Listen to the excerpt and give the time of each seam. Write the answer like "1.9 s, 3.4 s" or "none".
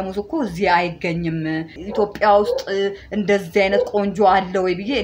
1.8 s